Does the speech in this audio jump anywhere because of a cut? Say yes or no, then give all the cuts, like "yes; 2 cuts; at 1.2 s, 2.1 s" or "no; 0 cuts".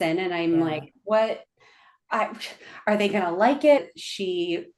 yes; 1 cut; at 3.8 s